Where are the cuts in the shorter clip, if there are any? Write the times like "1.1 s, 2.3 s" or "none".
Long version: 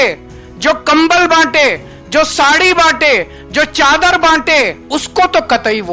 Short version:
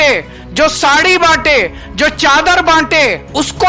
none